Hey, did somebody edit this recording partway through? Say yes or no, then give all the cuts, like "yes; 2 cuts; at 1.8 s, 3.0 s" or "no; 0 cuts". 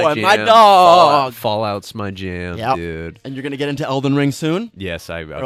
no; 0 cuts